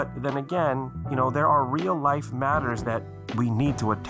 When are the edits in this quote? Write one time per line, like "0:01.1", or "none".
0:01.0